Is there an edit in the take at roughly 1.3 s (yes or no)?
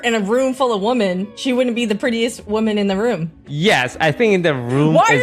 yes